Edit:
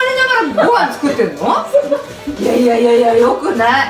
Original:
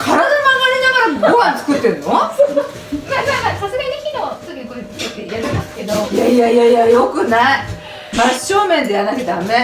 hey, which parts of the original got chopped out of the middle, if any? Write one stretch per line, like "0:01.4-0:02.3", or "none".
0:03.0-0:06.1